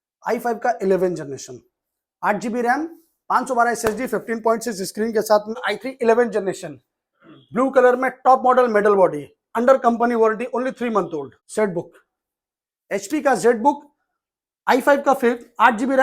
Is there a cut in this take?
yes; 2 cuts; at 5.7 s, 11.4 s

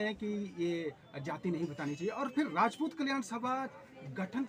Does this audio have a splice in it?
no; 0 cuts

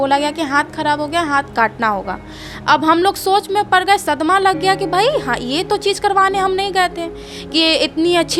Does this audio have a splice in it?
no; 0 cuts

